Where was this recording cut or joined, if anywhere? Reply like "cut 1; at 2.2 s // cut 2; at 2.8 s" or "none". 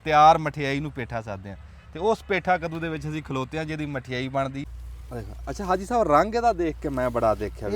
cut 1; at 4.6 s